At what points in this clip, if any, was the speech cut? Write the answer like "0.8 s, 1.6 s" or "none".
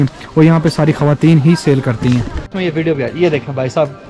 2.4 s

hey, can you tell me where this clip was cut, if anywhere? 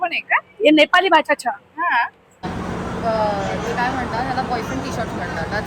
2.4 s

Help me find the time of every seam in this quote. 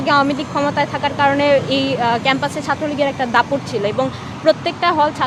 none

